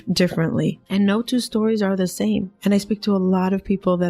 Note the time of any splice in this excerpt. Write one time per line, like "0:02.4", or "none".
0:02.5